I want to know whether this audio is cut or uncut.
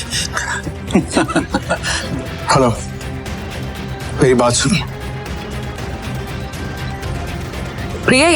cut